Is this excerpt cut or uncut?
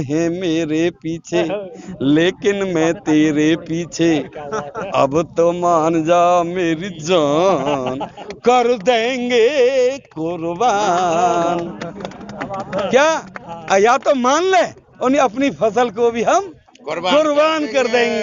uncut